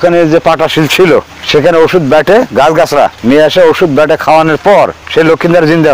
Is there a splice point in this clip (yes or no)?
no